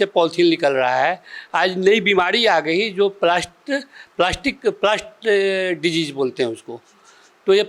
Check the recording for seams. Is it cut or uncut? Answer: uncut